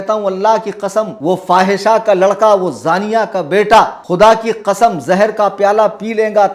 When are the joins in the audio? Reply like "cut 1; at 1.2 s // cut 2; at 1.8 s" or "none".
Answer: cut 1; at 1.1 s // cut 2; at 4.0 s